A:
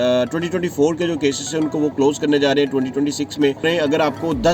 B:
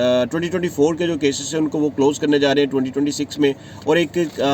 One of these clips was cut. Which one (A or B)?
A